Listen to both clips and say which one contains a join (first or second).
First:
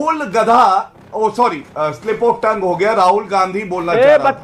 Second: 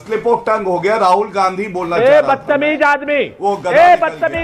first